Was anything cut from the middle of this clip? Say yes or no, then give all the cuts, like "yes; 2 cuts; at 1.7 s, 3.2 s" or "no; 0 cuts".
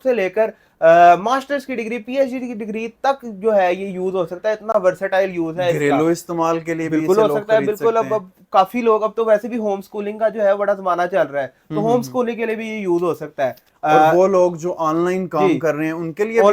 no; 0 cuts